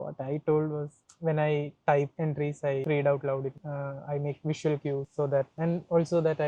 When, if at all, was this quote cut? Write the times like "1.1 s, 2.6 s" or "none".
none